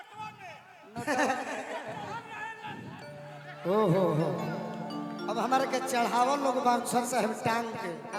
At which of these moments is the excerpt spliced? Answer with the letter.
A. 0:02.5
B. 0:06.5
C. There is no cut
C